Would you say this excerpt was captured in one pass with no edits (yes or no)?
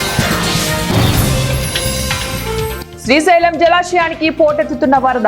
yes